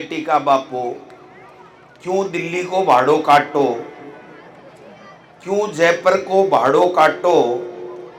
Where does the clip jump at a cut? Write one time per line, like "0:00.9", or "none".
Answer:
none